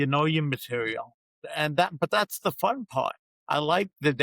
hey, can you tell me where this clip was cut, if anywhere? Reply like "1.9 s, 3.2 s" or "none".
1.4 s, 3.3 s

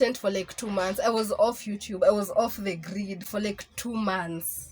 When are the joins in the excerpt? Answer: none

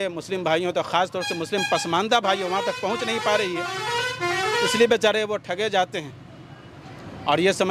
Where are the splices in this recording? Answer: none

